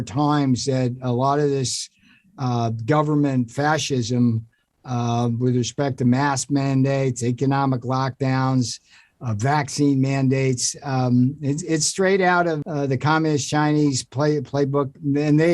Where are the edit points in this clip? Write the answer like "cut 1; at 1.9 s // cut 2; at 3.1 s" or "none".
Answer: cut 1; at 12.6 s